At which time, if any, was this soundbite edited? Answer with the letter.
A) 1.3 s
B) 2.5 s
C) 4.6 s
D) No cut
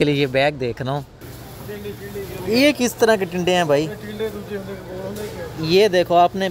A